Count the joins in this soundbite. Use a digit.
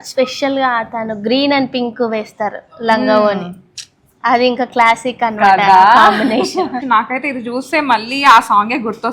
1